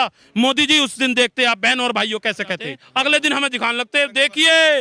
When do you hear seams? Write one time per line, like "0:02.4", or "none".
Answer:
0:02.8